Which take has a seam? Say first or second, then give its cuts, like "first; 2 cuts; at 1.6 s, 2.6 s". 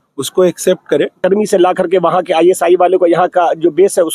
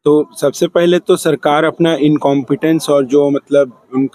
first; 1 cut; at 1.2 s